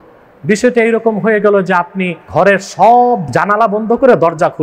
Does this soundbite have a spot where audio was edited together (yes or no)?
yes